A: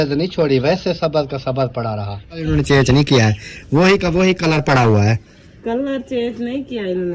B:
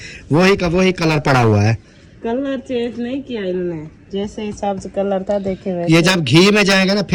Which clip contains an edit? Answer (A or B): A